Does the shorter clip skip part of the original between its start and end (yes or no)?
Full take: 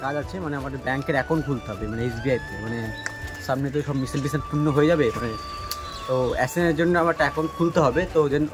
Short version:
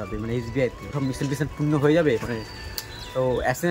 yes